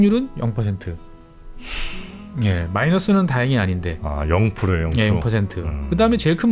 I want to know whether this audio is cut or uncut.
uncut